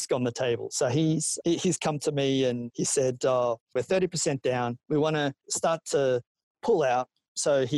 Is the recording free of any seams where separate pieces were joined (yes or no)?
yes